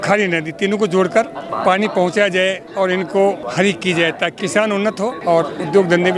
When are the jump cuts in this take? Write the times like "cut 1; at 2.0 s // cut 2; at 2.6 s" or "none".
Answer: cut 1; at 1.4 s // cut 2; at 3.4 s // cut 3; at 4.8 s